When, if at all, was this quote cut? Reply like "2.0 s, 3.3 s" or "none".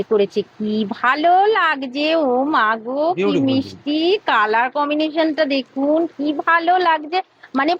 none

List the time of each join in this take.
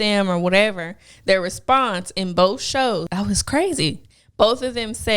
3.1 s

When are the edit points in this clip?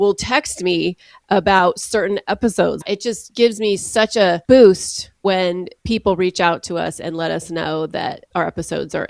2.8 s, 4.4 s, 5.7 s, 8.2 s

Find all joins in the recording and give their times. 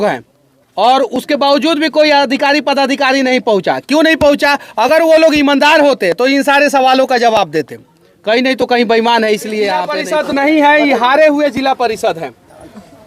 10.0 s

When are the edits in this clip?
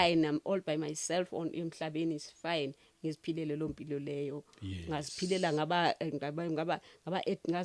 none

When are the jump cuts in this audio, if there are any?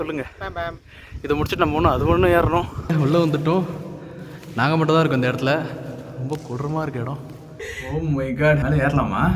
2.9 s, 7.8 s

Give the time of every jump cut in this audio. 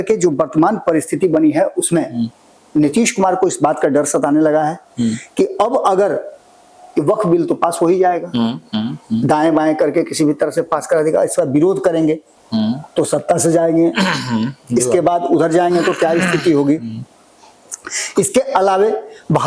none

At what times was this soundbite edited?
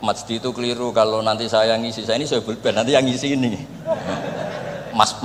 none

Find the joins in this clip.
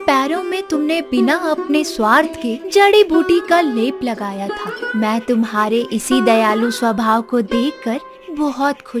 none

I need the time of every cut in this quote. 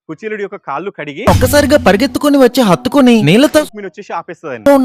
3.6 s

